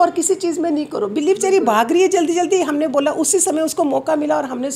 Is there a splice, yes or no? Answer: no